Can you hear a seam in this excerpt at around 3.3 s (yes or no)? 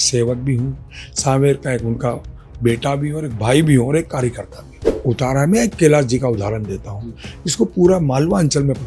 no